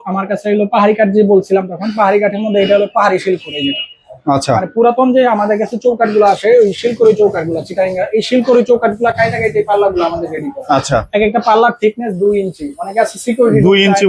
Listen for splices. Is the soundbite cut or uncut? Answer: uncut